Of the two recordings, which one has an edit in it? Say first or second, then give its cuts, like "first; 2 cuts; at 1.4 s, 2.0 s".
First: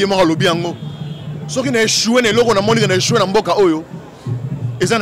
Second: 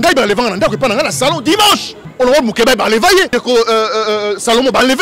second; 2 cuts; at 2.0 s, 3.3 s